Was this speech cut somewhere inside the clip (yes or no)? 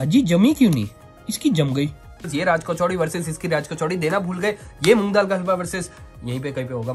yes